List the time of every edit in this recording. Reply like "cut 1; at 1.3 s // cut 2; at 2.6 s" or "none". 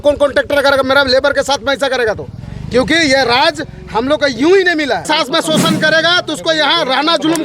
cut 1; at 5.1 s

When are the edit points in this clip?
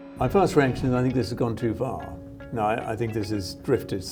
none

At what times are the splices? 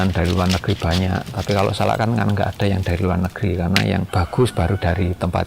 cut 1; at 4.1 s

